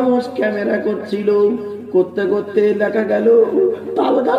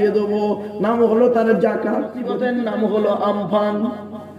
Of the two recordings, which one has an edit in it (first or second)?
second